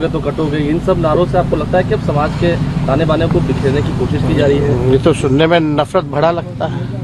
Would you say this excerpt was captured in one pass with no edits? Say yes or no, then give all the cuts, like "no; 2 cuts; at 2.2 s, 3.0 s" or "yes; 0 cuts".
yes; 0 cuts